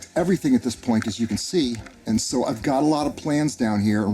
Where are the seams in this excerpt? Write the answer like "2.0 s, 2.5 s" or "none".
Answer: 1.9 s